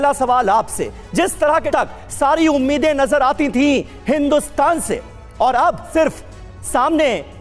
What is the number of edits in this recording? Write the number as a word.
two